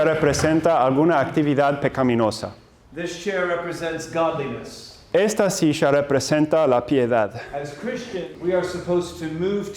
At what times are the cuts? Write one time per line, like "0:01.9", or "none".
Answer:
0:08.2